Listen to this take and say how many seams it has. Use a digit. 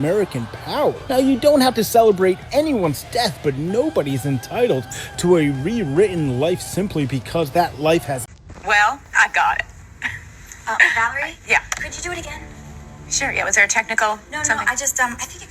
1